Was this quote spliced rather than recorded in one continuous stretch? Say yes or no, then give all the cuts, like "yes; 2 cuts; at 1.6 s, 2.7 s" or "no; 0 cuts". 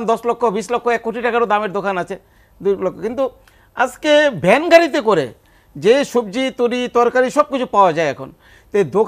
no; 0 cuts